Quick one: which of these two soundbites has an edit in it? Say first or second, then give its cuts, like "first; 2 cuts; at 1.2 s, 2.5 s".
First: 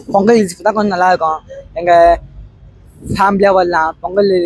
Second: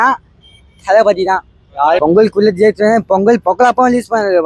second; 1 cut; at 2.0 s